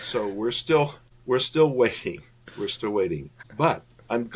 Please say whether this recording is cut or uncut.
cut